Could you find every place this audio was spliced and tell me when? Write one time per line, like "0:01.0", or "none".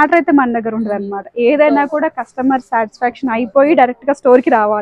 none